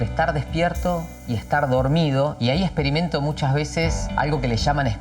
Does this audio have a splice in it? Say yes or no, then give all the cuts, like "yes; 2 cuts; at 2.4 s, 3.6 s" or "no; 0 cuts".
yes; 2 cuts; at 2.4 s, 4.0 s